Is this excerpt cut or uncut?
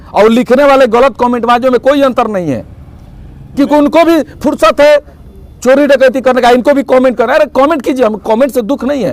uncut